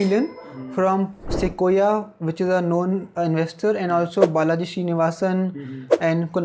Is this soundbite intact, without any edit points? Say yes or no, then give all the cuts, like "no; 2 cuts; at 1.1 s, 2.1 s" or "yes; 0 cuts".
yes; 0 cuts